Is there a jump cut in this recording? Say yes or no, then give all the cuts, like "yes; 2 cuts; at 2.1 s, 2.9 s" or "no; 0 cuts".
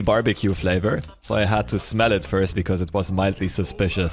yes; 1 cut; at 1.1 s